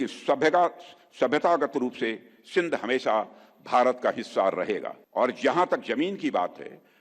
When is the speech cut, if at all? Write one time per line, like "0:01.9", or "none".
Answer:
0:05.0